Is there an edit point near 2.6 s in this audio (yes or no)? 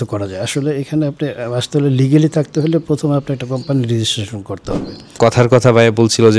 no